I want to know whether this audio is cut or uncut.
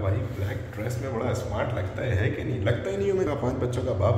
cut